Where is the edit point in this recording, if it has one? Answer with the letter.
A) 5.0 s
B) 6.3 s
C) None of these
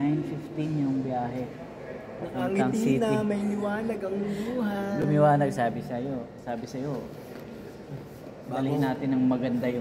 C